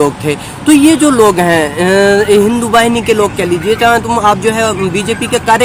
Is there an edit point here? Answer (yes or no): no